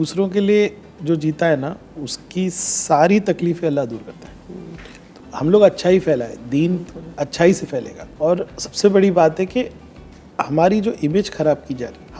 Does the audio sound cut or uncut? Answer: uncut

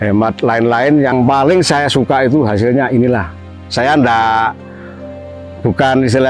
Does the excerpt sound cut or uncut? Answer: cut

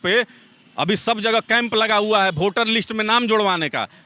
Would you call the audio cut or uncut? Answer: uncut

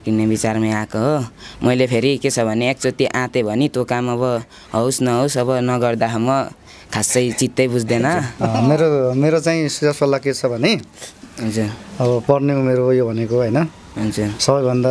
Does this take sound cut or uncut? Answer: cut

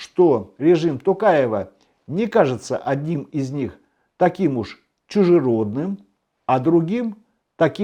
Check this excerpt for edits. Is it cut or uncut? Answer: uncut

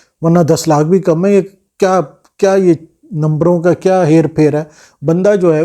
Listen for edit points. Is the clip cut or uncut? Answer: uncut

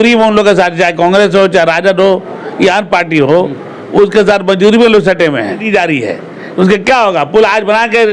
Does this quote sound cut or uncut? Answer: cut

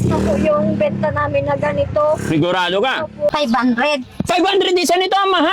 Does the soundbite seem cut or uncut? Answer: cut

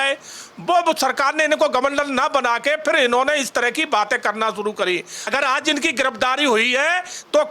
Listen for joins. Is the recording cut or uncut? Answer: cut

